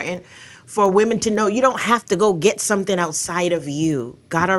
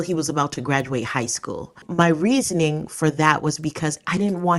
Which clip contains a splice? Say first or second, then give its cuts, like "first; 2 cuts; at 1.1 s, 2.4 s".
second; 1 cut; at 1.8 s